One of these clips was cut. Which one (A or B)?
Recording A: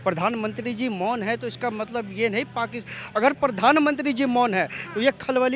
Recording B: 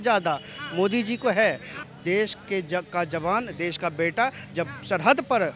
B